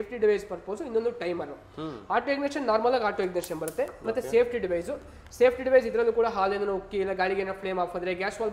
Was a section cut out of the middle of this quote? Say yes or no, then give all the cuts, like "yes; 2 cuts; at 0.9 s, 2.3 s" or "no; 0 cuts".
no; 0 cuts